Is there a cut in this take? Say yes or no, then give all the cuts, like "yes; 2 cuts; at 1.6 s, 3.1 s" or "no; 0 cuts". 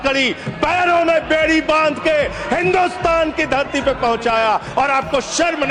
no; 0 cuts